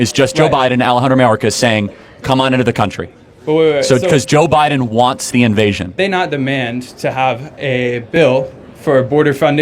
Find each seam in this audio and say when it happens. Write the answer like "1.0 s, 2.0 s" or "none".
5.9 s